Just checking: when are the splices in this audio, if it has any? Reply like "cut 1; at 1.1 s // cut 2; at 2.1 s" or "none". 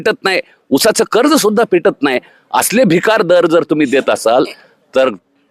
none